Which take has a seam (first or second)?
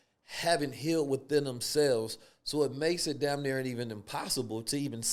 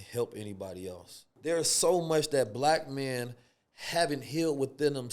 second